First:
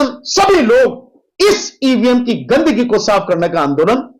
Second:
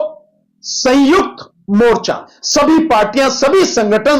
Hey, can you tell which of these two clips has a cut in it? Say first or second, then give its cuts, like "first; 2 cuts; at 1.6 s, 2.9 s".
second; 1 cut; at 2.3 s